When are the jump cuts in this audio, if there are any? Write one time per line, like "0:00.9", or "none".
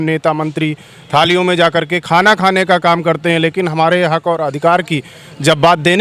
none